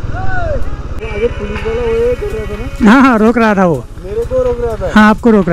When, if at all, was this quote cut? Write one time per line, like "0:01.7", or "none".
0:01.0